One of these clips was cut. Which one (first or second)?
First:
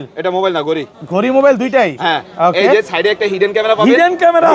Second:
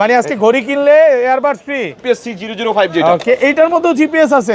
second